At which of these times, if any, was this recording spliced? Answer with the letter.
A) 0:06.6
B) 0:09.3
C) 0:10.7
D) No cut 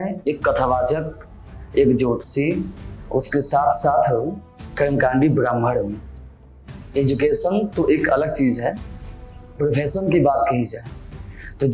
D